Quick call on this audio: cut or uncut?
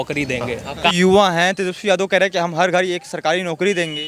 cut